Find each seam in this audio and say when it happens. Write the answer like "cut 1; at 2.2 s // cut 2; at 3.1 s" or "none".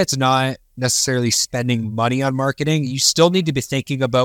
none